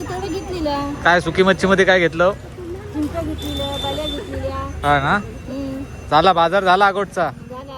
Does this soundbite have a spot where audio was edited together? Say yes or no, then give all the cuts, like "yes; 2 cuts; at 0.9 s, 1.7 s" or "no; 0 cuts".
no; 0 cuts